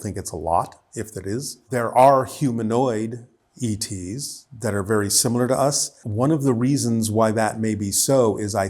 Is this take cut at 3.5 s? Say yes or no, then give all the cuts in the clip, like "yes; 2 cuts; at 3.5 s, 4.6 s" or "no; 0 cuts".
no; 2 cuts; at 1.7 s, 6.0 s